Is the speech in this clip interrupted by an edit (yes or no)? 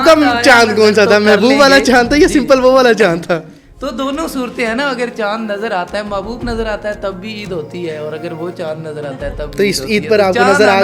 no